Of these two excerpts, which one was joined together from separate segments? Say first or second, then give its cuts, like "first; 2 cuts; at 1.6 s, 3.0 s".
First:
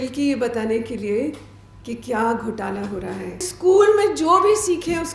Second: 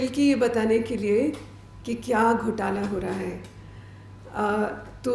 first; 1 cut; at 3.5 s